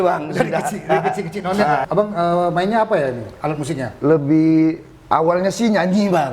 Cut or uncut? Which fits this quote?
cut